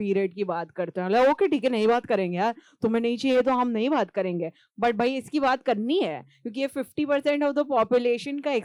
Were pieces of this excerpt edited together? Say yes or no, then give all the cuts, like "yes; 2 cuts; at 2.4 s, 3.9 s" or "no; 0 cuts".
no; 0 cuts